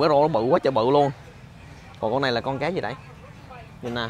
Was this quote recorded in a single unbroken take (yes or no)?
yes